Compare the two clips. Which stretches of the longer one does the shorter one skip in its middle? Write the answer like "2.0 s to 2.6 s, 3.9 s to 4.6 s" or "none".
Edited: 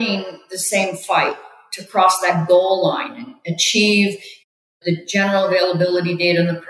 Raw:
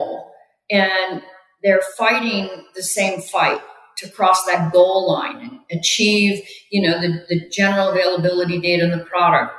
6.7 s to 6.9 s